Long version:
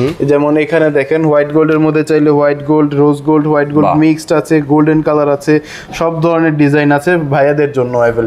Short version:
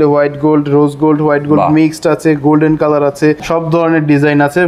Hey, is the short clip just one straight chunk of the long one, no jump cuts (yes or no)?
no